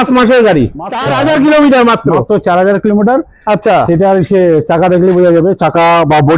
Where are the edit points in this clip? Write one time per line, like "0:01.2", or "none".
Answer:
0:01.0